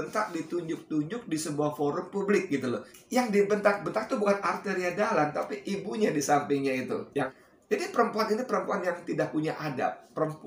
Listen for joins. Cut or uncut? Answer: cut